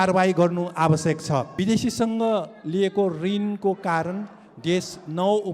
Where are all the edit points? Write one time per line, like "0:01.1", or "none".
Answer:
0:01.5